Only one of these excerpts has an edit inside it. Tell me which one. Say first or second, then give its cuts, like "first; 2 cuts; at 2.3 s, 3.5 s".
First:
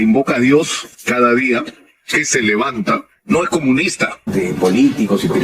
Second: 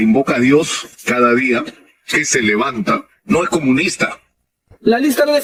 first; 1 cut; at 4.2 s